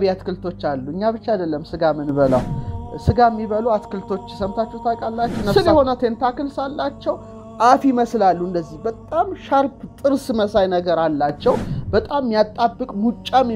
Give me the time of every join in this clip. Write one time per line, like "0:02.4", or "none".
0:05.5